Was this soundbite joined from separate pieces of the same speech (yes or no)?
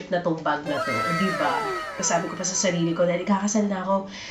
yes